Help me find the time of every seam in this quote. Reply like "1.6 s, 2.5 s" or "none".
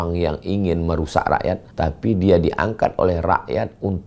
1.7 s